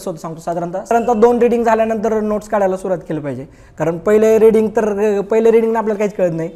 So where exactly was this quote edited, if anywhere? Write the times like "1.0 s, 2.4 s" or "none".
0.9 s